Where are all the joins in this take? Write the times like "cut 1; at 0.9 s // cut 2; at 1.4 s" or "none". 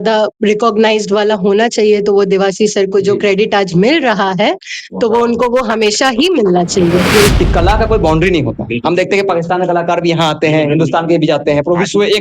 cut 1; at 7.3 s